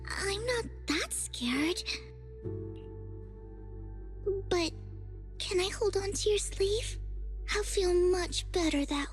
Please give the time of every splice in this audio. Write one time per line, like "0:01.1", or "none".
none